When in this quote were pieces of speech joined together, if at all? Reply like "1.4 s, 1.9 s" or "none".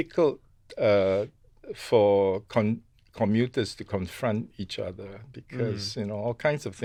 none